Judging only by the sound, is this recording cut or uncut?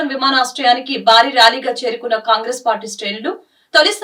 uncut